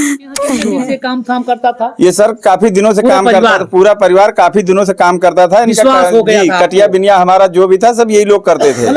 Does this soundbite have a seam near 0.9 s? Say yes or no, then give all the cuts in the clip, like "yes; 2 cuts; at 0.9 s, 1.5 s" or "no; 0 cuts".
yes; 1 cut; at 0.9 s